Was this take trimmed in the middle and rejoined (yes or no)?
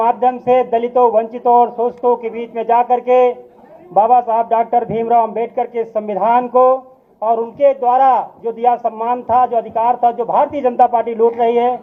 no